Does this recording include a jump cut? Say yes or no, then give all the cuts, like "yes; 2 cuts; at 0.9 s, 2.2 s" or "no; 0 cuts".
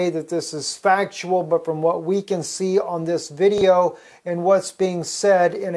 yes; 1 cut; at 3.2 s